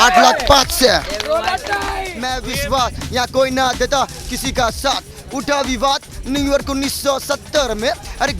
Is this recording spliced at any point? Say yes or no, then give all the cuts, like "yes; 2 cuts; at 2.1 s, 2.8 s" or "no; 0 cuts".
yes; 1 cut; at 2.1 s